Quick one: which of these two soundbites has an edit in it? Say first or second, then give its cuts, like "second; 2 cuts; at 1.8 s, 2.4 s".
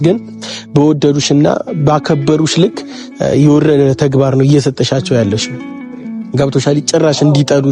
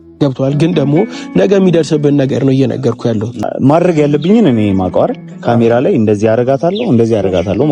second; 1 cut; at 3.5 s